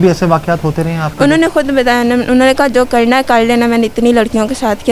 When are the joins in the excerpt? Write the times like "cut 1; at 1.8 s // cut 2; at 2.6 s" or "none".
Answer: none